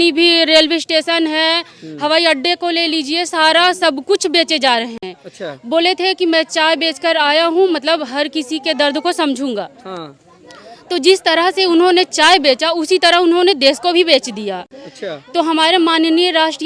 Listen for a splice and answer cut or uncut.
uncut